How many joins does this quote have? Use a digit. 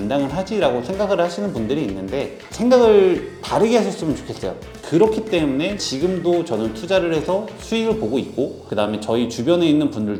0